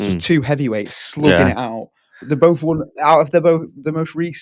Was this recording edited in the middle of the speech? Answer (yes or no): no